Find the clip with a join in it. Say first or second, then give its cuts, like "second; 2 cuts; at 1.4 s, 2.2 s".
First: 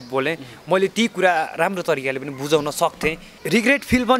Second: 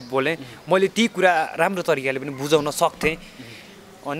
first; 1 cut; at 3.3 s